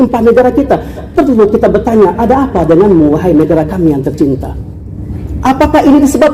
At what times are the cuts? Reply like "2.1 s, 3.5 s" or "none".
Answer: 4.8 s